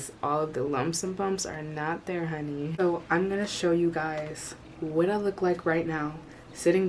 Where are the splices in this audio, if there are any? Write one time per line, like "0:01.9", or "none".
0:02.7